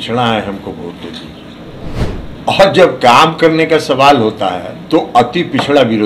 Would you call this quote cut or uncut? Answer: cut